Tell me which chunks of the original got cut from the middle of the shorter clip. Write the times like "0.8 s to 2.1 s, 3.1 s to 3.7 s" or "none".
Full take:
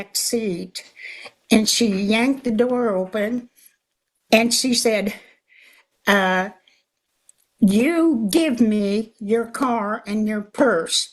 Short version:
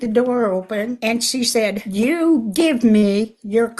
3.4 s to 4.3 s, 5.3 s to 7.7 s